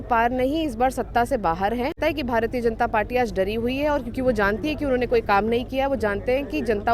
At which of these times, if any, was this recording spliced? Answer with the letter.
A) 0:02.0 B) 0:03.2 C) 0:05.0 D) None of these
A